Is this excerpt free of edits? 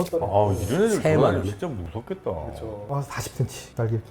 no; 1 cut; at 2.8 s

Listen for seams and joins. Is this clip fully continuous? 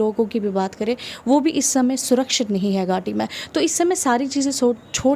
yes; 0 cuts

